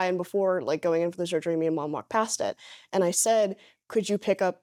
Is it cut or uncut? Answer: uncut